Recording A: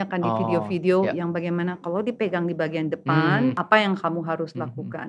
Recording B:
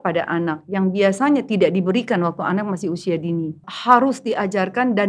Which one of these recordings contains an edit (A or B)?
B